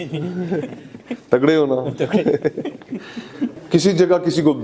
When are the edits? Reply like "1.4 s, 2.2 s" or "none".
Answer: 3.5 s